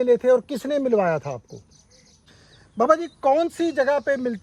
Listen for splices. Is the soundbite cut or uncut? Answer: cut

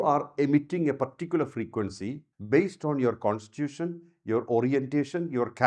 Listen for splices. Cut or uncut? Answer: cut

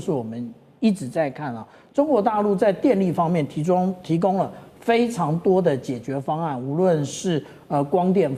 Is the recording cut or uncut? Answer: uncut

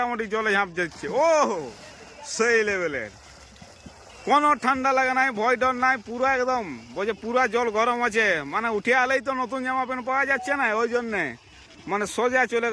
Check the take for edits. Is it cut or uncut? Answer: uncut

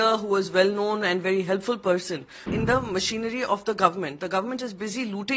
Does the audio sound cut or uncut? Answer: cut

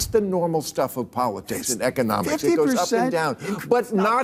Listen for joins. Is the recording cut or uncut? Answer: uncut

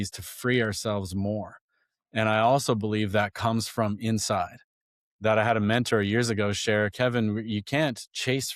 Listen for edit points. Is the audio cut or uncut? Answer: uncut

